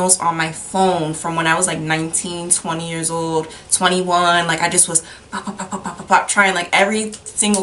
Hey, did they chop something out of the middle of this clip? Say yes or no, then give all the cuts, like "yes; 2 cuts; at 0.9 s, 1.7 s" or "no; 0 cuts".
no; 0 cuts